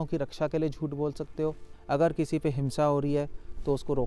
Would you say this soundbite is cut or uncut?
cut